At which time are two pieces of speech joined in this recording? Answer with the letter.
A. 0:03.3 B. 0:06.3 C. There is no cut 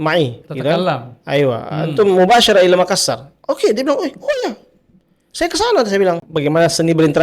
B